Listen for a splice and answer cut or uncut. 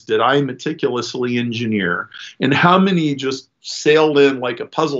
uncut